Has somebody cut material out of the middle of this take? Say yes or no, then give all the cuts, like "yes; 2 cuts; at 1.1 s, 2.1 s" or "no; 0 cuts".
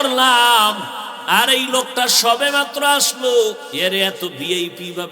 yes; 1 cut; at 3.7 s